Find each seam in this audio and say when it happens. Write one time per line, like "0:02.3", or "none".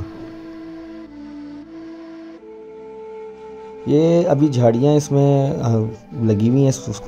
none